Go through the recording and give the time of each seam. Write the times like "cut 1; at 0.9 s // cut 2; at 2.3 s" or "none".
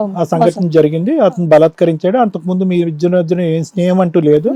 none